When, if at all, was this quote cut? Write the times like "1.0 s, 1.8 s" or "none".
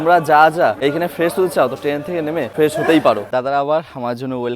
0.8 s, 2.5 s, 3.3 s